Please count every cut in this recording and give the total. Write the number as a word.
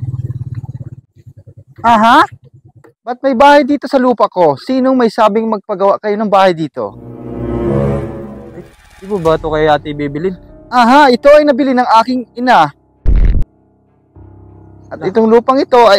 one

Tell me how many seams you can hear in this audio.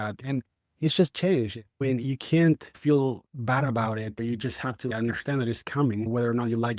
one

